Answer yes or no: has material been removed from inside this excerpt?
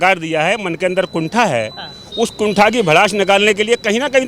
no